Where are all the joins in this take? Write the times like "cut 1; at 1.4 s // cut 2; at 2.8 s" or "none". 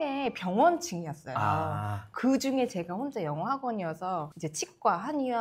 none

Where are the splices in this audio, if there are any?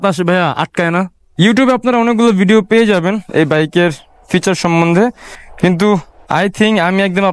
cut 1; at 1.2 s

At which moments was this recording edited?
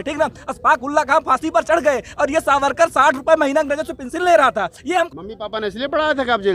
cut 1; at 5.1 s

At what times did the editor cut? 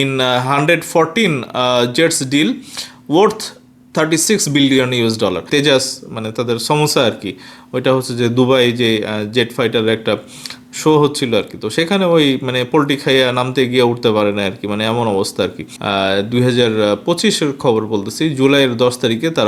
cut 1; at 5.5 s // cut 2; at 15.7 s

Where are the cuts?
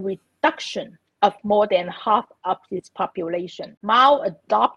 cut 1; at 3.6 s

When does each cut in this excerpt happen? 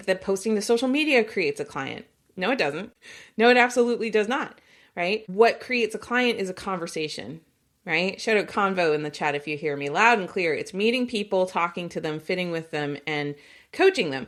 none

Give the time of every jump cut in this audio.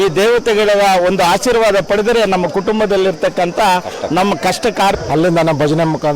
cut 1; at 5.0 s

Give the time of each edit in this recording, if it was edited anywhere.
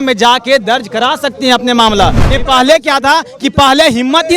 cut 1; at 2.2 s

